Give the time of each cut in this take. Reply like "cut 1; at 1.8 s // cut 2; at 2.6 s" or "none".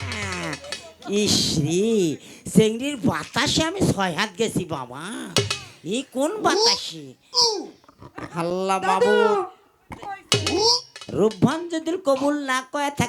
none